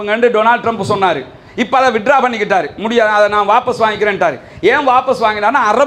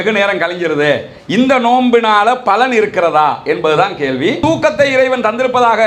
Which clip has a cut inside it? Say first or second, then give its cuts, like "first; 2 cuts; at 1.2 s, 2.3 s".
second; 1 cut; at 4.4 s